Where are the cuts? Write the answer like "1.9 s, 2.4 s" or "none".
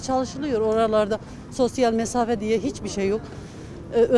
none

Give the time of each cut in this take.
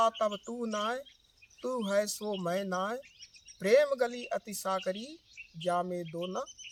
none

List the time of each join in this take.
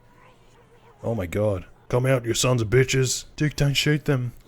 1.7 s, 3.2 s

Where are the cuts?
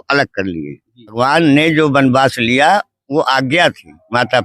1.1 s

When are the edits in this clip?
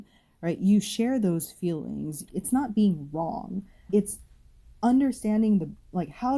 2.2 s, 3.8 s

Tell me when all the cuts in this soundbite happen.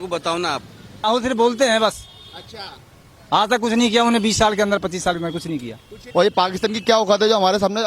0.9 s, 6.0 s

